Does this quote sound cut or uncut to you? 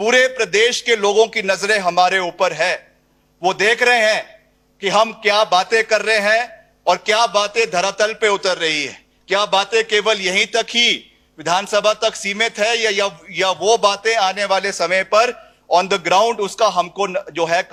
uncut